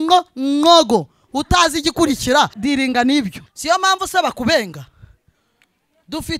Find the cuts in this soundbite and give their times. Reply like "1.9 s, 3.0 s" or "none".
2.5 s, 3.5 s